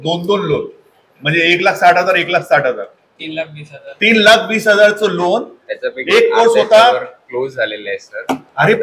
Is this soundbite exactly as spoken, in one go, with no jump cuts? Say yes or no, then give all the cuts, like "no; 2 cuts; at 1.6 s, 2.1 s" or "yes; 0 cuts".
yes; 0 cuts